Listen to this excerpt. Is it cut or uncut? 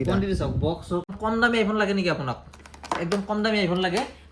cut